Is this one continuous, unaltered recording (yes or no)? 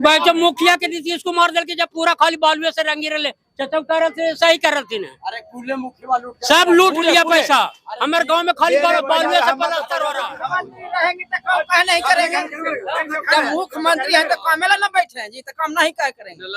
no